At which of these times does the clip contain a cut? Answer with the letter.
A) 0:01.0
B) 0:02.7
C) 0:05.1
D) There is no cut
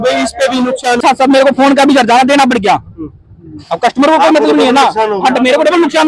A